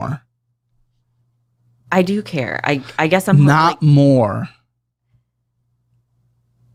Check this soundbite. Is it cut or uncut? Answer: uncut